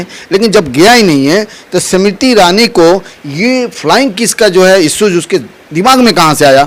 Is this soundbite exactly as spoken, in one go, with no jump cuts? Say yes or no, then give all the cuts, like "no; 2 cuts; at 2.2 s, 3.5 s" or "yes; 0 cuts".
yes; 0 cuts